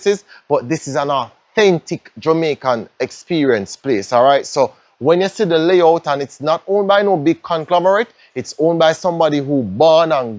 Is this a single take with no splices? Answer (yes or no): yes